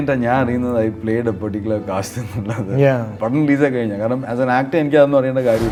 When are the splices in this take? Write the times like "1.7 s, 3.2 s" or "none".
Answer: none